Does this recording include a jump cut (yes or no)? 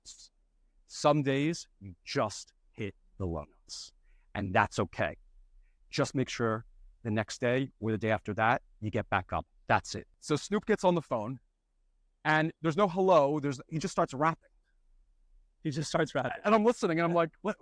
yes